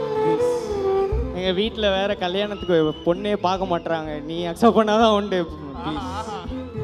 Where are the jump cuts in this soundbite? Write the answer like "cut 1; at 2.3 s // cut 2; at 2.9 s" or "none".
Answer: cut 1; at 1.3 s